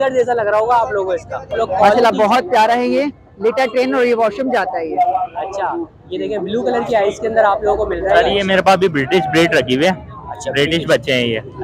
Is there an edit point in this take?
yes; 2 cuts; at 1.5 s, 8.1 s

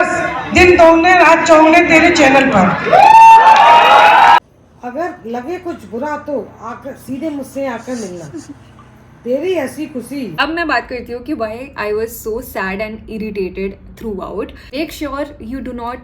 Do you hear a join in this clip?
yes; 3 cuts; at 4.4 s, 10.3 s, 14.7 s

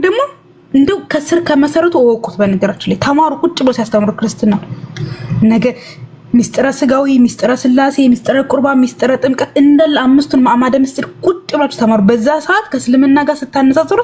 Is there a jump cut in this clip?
no; 0 cuts

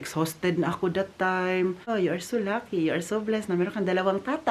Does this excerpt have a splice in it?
yes; 1 cut; at 1.8 s

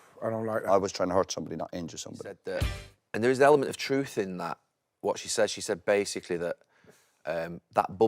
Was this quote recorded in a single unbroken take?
no; 1 cut; at 2.4 s

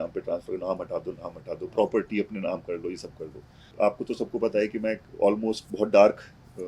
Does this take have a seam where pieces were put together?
yes; 1 cut; at 3.7 s

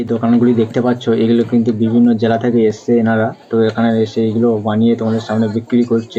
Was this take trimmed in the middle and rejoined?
no; 0 cuts

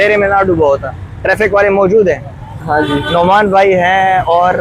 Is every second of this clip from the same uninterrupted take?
yes; 0 cuts

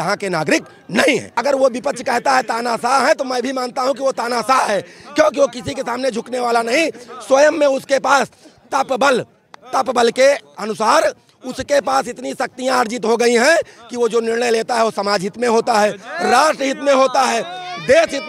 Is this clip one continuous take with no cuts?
no; 1 cut; at 1.3 s

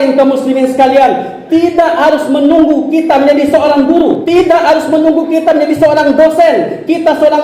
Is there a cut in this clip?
yes; 1 cut; at 4.2 s

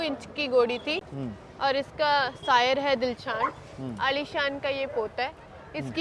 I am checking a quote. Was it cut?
yes; 1 cut; at 1.1 s

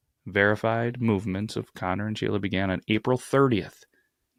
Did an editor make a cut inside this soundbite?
no; 0 cuts

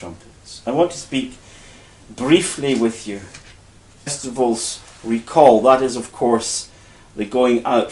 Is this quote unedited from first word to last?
yes; 0 cuts

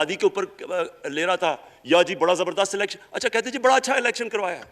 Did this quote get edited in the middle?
no; 0 cuts

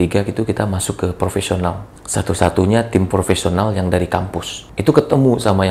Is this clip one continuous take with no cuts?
no; 2 cuts; at 1.9 s, 4.6 s

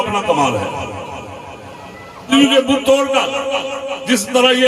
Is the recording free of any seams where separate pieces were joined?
no; 1 cut; at 2.3 s

